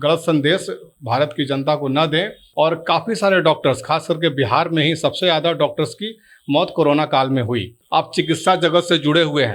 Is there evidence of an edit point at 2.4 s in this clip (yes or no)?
yes